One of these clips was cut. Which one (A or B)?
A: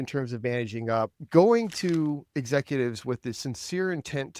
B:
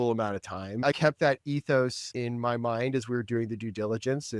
B